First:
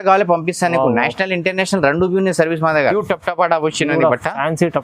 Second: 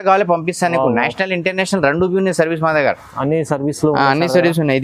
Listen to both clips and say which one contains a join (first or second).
first